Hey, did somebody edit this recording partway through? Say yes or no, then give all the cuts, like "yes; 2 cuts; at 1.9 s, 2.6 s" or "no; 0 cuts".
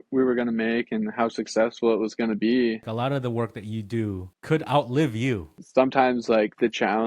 yes; 2 cuts; at 2.8 s, 5.6 s